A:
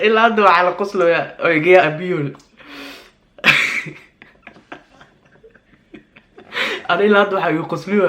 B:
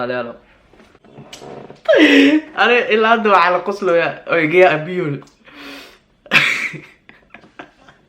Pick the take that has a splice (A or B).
B